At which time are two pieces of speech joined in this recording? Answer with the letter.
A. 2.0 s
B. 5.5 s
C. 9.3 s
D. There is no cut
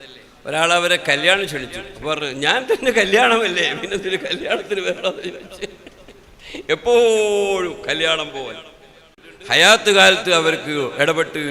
C